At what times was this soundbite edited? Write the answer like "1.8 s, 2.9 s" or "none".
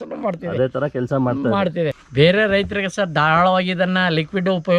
2.0 s